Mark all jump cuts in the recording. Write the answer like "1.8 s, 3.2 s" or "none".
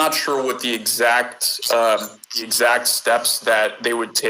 2.4 s